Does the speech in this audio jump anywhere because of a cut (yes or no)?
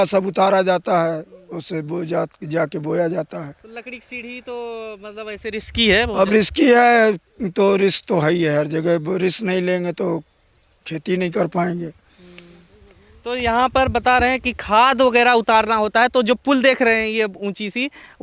no